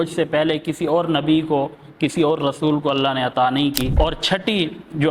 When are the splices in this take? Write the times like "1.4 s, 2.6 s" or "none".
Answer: 3.9 s

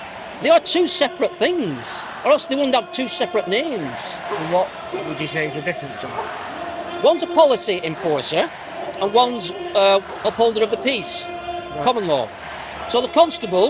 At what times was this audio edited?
none

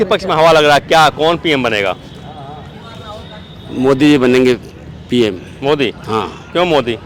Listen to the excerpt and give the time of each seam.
none

